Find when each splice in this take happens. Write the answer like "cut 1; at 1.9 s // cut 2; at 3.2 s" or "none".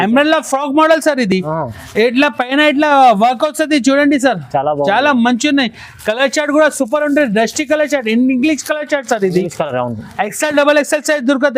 none

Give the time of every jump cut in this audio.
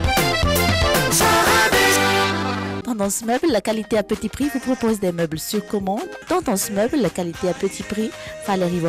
cut 1; at 2.7 s

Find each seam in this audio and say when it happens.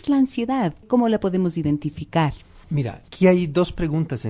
cut 1; at 1.3 s

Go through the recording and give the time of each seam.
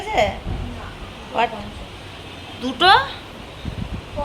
none

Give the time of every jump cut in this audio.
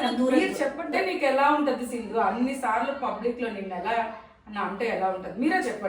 cut 1; at 0.9 s

